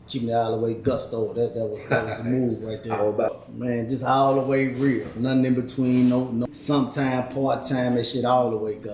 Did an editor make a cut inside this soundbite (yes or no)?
yes